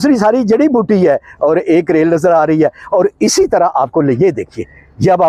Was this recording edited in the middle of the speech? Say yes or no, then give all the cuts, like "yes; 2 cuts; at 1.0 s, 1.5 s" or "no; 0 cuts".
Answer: no; 0 cuts